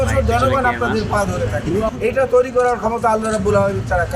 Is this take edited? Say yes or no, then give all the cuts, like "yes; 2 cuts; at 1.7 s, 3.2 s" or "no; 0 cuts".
yes; 1 cut; at 1.9 s